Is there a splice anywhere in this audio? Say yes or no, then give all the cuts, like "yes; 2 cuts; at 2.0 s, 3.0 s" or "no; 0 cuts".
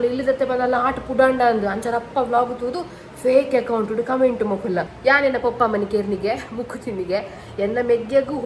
yes; 1 cut; at 4.9 s